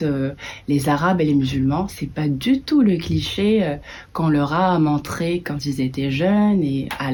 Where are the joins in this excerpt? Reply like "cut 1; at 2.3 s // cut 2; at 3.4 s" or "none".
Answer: none